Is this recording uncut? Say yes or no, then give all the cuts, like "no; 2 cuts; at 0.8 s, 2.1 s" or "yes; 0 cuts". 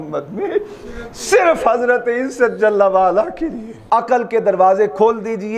no; 1 cut; at 3.7 s